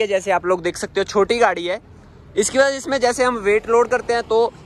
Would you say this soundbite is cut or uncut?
uncut